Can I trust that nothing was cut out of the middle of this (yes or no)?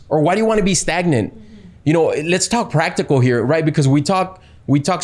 yes